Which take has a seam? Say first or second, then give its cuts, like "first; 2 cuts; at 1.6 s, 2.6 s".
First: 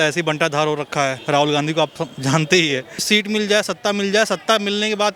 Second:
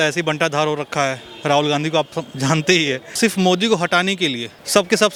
first; 2 cuts; at 1.2 s, 3.0 s